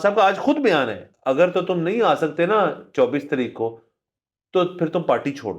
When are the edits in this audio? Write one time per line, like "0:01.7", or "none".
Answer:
0:01.1